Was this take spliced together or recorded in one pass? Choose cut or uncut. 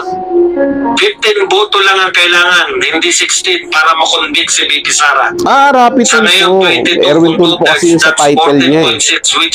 uncut